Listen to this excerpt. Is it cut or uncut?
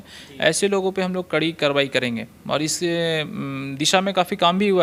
uncut